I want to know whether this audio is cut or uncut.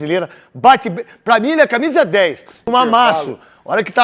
cut